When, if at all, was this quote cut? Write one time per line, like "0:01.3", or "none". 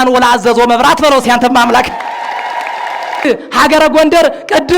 0:03.2